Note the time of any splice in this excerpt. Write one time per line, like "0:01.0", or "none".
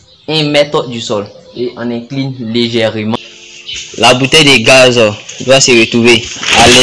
0:03.3